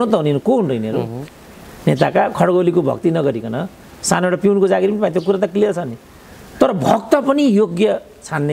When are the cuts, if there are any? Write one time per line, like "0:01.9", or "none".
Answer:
none